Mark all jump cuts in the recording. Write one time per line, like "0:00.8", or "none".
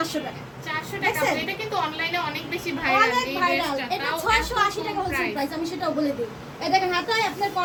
none